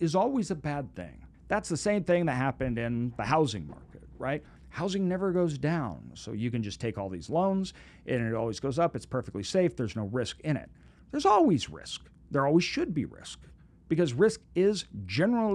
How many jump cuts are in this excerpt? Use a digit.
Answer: 1